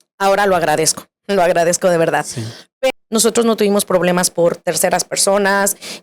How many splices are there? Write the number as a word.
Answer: one